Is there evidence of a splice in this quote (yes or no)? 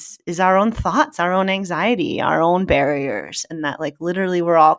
no